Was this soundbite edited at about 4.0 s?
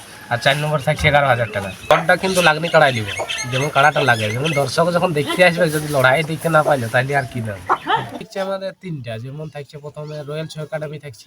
no; 2 cuts; at 1.9 s, 8.2 s

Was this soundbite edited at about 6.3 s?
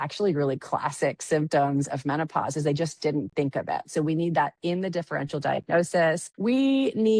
yes; 1 cut; at 6.3 s

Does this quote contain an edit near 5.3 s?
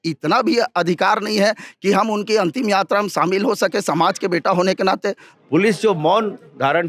yes; 1 cut; at 5.3 s

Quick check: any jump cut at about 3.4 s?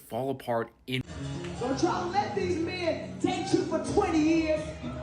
no; 1 cut; at 1.0 s

